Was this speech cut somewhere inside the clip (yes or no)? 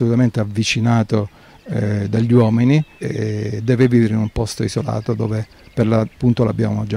yes